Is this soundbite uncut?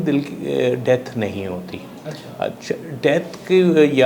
yes; 0 cuts

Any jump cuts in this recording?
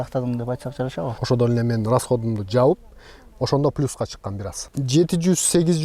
yes; 2 cuts; at 1.2 s, 4.6 s

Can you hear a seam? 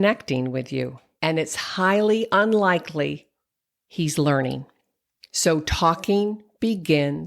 yes; 1 cut; at 1.0 s

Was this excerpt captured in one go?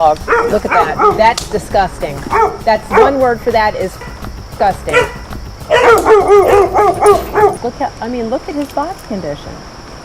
no; 1 cut; at 7.6 s

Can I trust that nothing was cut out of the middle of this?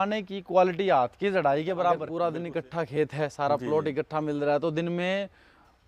no; 1 cut; at 2.1 s

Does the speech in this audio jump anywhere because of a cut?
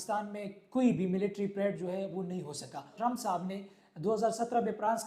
yes; 1 cut; at 2.9 s

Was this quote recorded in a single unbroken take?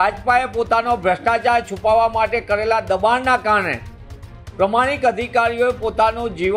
yes; 0 cuts

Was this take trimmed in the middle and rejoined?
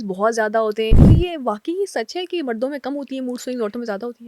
yes; 1 cut; at 1.0 s

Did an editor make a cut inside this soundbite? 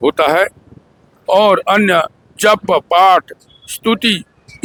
no; 0 cuts

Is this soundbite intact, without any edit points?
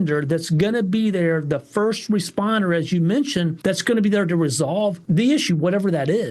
no; 2 cuts; at 3.5 s, 5.0 s

